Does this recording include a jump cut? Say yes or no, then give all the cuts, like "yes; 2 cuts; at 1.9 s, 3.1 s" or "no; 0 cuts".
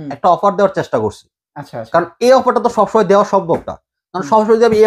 no; 0 cuts